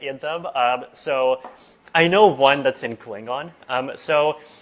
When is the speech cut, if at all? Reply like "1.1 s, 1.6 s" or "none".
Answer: none